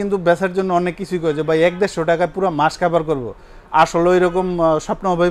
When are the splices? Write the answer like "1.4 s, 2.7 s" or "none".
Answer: none